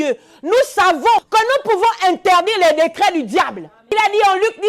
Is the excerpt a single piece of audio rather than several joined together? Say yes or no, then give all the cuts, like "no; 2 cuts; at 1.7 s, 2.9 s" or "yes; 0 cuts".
no; 2 cuts; at 1.2 s, 3.8 s